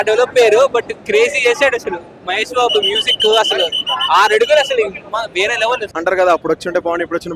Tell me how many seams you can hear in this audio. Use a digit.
1